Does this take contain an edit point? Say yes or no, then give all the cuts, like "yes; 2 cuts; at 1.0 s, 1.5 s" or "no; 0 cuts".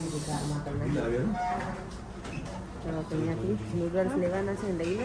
no; 0 cuts